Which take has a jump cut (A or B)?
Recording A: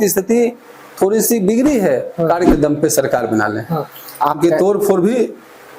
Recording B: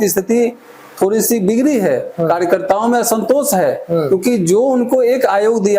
A